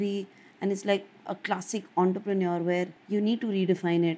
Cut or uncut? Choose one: cut